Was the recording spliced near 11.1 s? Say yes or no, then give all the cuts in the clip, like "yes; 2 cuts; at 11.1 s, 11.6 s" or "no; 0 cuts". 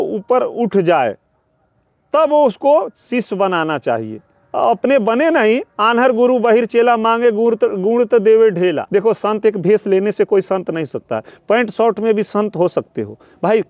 no; 1 cut; at 8.8 s